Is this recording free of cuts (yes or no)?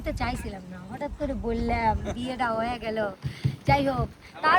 yes